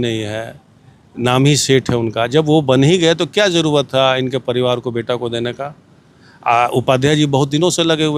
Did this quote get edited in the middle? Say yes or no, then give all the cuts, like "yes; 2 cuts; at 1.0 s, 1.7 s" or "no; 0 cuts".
no; 0 cuts